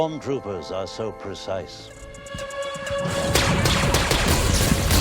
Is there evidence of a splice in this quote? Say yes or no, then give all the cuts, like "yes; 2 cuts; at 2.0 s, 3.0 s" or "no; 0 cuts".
yes; 1 cut; at 1.8 s